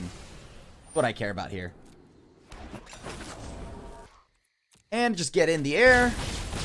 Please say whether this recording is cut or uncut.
cut